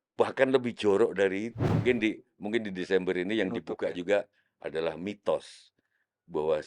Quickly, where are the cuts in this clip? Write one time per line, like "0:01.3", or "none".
0:01.6